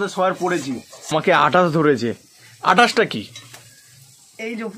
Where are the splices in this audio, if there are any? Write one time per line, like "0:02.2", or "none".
0:00.9